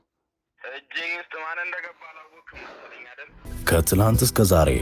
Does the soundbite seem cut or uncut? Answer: cut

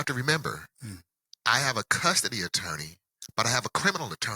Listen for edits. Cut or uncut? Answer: uncut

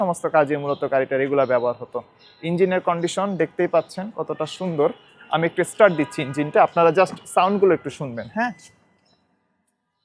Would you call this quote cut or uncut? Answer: uncut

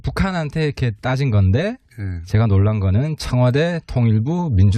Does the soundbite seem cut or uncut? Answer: cut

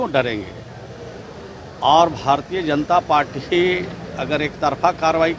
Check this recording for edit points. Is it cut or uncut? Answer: uncut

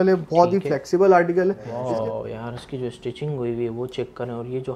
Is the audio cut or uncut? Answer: cut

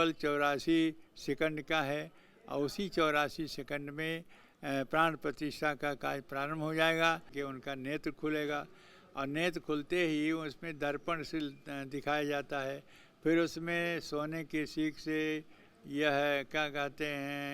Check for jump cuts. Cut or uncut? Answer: cut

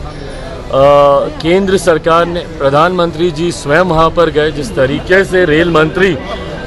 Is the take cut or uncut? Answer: uncut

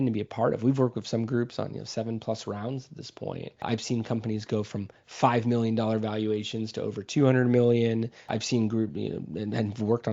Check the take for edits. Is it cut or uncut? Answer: cut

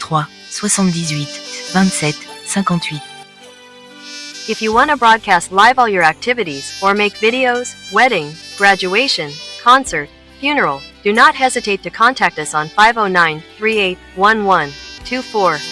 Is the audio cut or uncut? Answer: cut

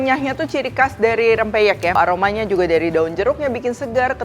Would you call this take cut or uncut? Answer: cut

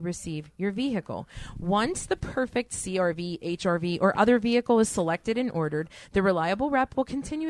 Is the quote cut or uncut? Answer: uncut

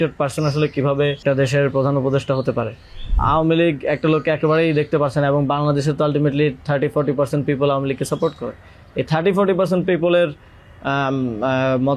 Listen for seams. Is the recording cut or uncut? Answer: cut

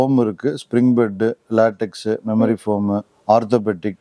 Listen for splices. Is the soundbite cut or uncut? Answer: uncut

